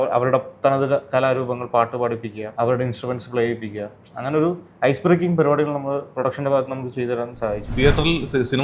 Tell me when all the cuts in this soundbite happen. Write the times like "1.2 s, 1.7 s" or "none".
2.4 s, 7.7 s

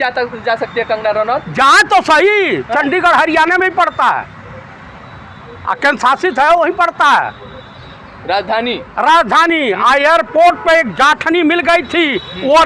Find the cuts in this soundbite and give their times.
none

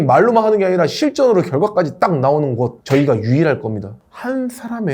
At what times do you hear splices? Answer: 3.9 s

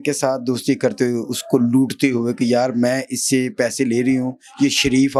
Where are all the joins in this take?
none

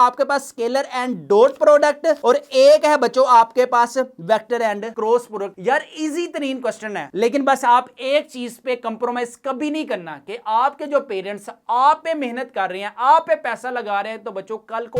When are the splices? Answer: 7.0 s

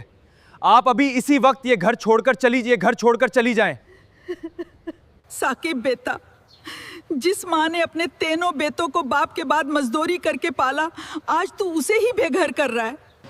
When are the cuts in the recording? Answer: 5.1 s

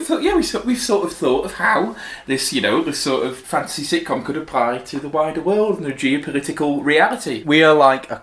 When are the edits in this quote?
3.4 s, 7.4 s

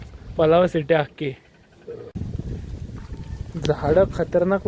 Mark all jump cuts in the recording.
2.1 s

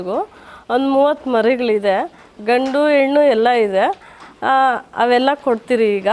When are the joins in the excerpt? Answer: none

